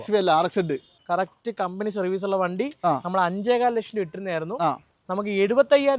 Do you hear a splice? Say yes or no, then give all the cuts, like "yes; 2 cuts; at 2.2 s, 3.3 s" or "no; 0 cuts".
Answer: yes; 1 cut; at 1.0 s